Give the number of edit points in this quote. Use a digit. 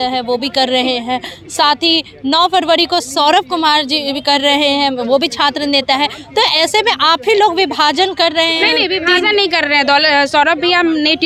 0